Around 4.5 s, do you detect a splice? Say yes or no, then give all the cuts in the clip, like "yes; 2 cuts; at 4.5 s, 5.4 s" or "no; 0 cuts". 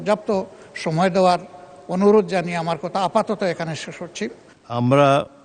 yes; 1 cut; at 4.5 s